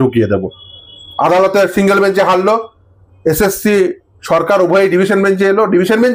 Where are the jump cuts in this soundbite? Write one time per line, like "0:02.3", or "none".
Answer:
none